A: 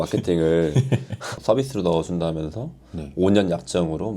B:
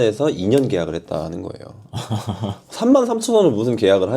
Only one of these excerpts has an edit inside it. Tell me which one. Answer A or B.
A